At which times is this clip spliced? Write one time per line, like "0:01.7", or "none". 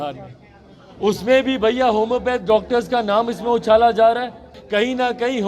0:04.5